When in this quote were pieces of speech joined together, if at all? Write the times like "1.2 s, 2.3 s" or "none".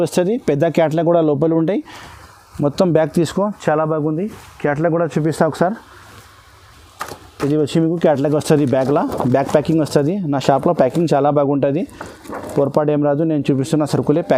none